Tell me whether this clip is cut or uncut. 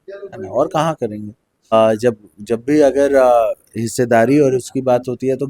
cut